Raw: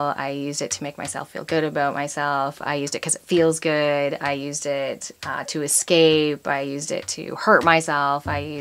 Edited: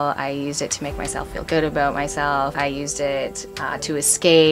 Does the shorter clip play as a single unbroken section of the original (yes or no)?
no